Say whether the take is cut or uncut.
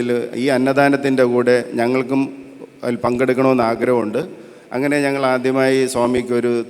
uncut